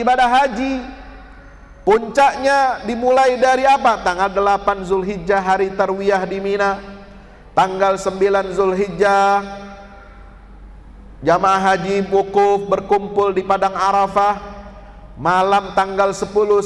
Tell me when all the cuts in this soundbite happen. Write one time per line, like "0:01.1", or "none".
none